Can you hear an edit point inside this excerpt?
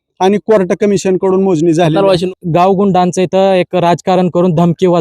yes; 1 cut; at 2.2 s

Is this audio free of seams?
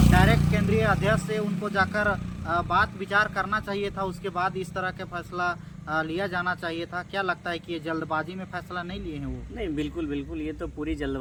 yes; 0 cuts

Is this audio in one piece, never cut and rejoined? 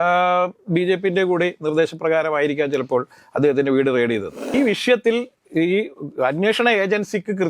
no; 1 cut; at 4.5 s

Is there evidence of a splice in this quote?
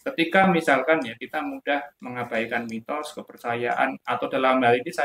no; 0 cuts

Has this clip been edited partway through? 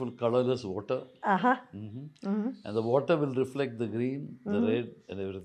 no; 0 cuts

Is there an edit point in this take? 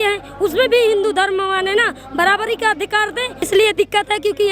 yes; 1 cut; at 3.5 s

